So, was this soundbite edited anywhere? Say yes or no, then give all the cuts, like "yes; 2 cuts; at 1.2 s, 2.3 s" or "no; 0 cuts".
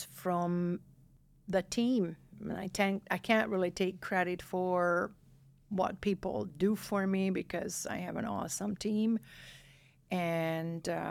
no; 0 cuts